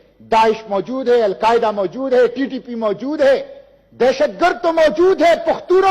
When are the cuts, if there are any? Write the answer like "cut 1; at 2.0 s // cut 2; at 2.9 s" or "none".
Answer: none